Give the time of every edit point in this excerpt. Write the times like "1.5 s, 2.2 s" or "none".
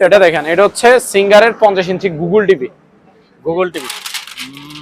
3.9 s

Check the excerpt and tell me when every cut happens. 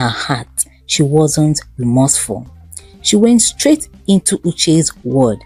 none

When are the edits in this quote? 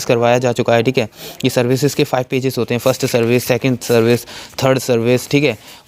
none

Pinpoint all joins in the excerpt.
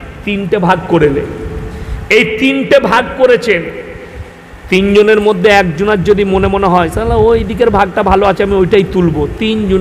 none

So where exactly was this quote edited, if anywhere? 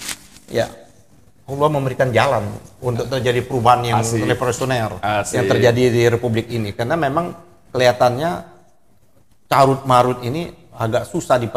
none

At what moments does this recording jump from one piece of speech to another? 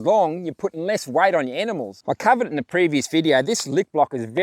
1.9 s

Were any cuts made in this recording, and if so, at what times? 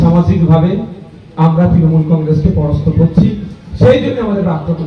none

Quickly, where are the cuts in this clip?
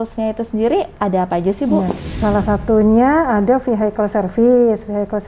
2.2 s

